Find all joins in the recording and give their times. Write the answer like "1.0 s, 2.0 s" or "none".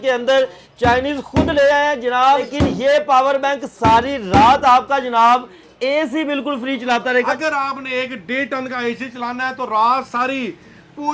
2.5 s, 7.3 s